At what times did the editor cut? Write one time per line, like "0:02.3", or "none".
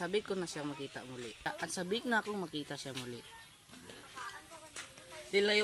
0:01.5